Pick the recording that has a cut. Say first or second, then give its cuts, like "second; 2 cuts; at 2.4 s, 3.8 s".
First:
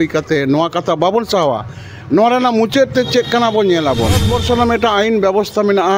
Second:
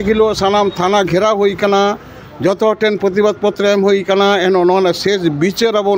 first; 1 cut; at 4.3 s